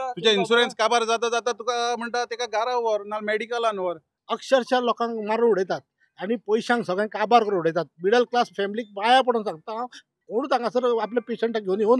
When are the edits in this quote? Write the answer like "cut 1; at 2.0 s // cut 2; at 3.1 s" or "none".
cut 1; at 4.1 s